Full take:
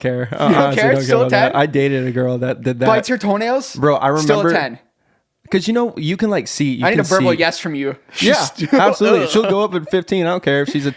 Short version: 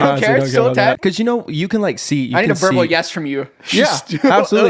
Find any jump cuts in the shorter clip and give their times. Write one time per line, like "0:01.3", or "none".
0:01.0